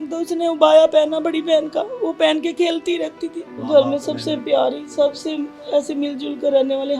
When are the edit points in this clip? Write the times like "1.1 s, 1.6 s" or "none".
3.6 s